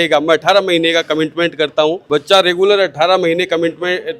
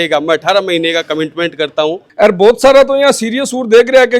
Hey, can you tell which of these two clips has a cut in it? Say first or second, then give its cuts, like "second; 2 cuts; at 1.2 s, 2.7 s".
second; 1 cut; at 2.0 s